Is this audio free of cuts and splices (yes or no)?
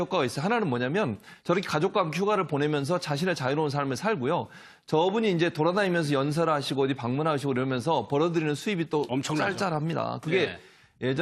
yes